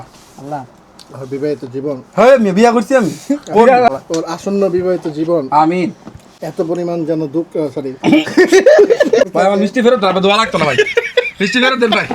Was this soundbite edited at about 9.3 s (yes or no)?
yes